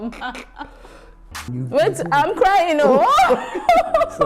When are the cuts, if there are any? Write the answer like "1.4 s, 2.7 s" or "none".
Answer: 1.5 s